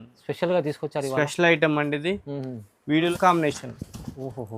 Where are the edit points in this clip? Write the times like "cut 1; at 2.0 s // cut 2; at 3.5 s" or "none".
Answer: cut 1; at 3.1 s